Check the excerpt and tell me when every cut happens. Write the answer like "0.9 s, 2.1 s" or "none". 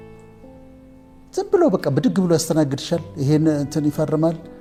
none

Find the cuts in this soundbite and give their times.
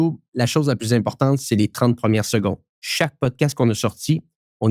2.7 s

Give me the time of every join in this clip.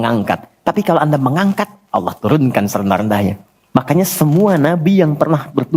3.5 s

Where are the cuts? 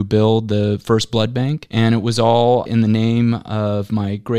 none

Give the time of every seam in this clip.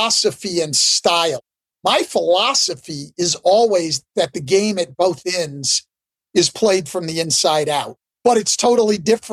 1.4 s, 8.0 s

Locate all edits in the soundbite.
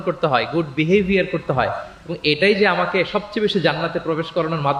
none

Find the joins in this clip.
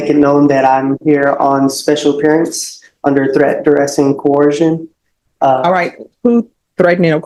none

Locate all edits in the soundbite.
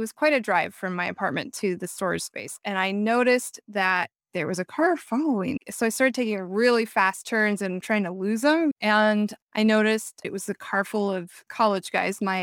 7.8 s, 8.8 s, 10.2 s, 11.5 s

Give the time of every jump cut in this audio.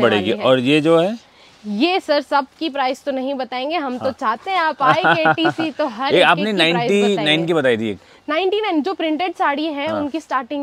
none

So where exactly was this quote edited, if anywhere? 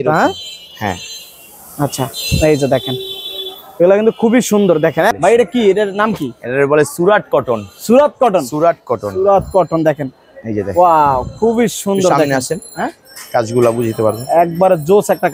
5.2 s

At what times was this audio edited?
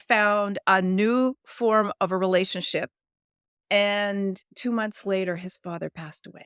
none

